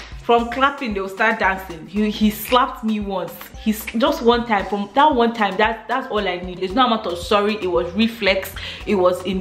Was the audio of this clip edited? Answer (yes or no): no